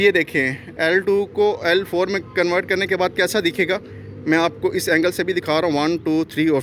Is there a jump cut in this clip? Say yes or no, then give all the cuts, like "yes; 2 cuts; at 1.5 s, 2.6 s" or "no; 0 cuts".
no; 0 cuts